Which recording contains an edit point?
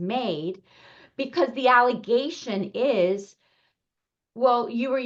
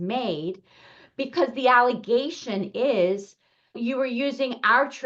second; 1 cut; at 3.8 s

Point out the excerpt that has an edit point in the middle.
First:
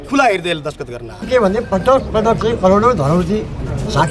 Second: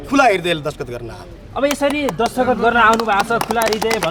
first; 1 cut; at 1.3 s

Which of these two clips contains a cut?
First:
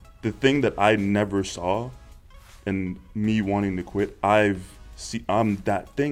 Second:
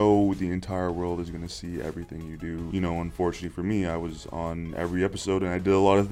second; 1 cut; at 2.7 s

